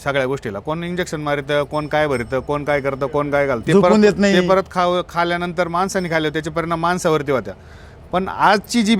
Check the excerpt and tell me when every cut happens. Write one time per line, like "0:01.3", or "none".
0:03.6